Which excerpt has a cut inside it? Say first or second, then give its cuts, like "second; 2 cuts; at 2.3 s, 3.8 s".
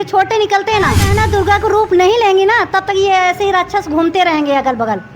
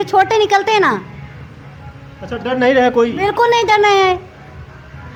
first; 1 cut; at 1.1 s